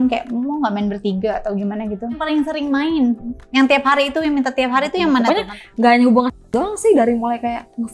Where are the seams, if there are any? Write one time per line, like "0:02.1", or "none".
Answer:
0:02.2
0:05.3